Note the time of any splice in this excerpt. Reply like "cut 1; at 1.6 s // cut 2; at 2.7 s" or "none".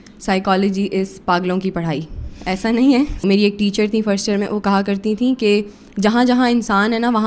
cut 1; at 3.2 s